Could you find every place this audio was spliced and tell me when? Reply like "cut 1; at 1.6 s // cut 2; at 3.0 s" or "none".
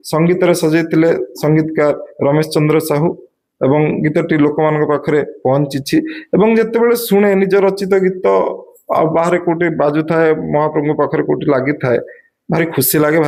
none